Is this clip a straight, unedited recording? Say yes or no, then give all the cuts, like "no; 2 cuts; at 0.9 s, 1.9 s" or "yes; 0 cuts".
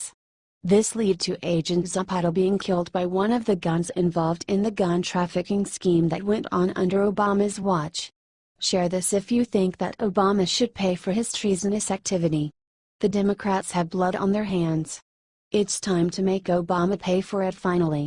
yes; 0 cuts